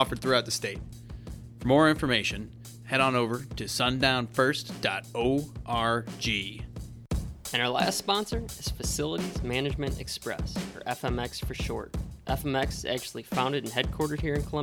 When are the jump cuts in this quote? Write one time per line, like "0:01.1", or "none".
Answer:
0:06.6